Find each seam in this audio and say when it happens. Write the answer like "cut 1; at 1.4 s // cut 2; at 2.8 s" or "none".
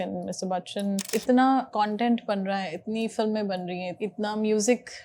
cut 1; at 1.0 s // cut 2; at 1.7 s // cut 3; at 3.9 s